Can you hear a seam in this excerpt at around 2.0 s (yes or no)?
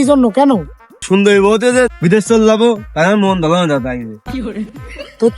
yes